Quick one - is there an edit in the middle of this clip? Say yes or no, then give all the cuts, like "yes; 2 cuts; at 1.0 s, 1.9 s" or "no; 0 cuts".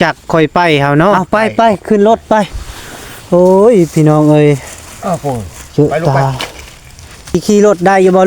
yes; 2 cuts; at 1.2 s, 7.4 s